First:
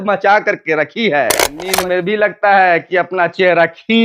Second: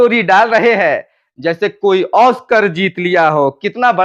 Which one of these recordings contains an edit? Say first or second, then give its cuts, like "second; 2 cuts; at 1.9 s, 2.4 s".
first; 1 cut; at 1.6 s